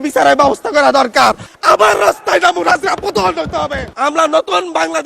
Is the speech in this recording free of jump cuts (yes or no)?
no